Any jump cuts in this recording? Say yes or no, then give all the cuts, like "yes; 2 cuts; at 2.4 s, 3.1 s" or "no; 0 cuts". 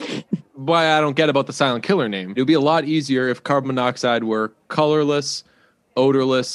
yes; 1 cut; at 2.4 s